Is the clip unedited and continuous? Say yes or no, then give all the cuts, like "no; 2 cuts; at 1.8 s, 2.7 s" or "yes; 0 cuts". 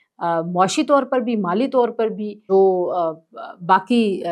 no; 1 cut; at 2.3 s